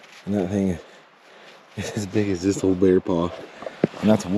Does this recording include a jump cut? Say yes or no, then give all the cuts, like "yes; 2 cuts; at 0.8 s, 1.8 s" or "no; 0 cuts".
no; 0 cuts